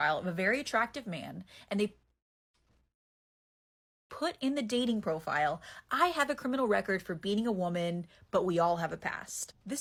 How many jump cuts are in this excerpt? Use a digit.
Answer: 0